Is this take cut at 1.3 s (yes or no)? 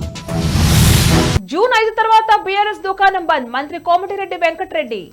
yes